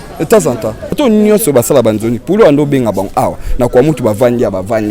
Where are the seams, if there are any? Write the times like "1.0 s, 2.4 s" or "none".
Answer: 1.0 s